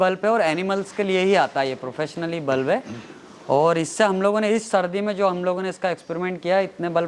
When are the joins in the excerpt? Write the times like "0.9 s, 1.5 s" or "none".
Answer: none